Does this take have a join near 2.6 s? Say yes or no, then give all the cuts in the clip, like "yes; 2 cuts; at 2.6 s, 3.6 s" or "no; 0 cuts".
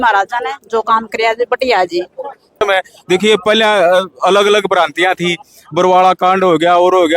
yes; 1 cut; at 2.6 s